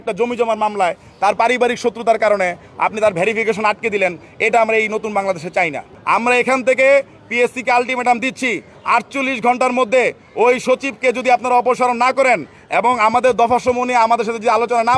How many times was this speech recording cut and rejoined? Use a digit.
1